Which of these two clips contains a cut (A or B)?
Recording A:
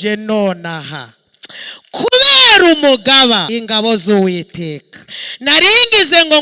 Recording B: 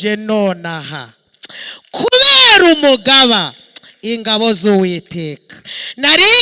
A